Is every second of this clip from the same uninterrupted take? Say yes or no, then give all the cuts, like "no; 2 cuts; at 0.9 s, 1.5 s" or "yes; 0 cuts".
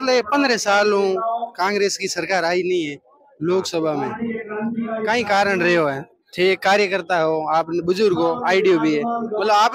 yes; 0 cuts